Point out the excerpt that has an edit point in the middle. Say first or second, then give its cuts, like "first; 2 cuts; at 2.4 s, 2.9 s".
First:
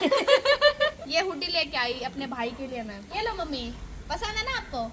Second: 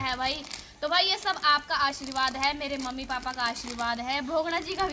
first; 2 cuts; at 0.9 s, 3.1 s